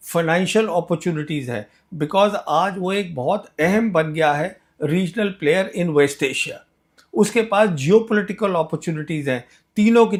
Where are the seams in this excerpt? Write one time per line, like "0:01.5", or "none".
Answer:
none